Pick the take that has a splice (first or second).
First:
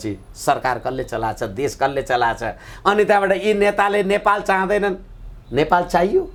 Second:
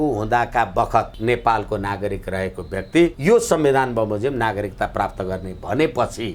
second